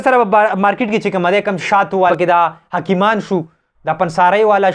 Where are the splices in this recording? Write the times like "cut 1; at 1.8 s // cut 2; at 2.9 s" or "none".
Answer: cut 1; at 2.1 s